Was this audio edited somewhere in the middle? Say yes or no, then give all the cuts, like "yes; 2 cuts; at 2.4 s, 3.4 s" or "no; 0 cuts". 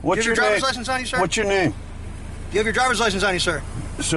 no; 0 cuts